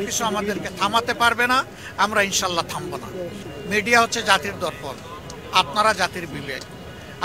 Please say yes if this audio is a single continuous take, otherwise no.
no